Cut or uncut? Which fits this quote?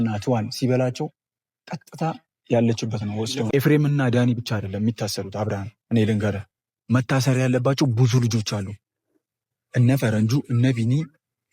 cut